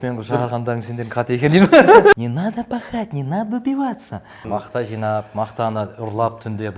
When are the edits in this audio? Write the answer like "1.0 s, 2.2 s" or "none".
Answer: 2.1 s, 4.4 s